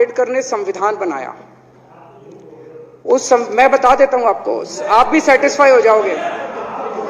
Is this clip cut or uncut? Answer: uncut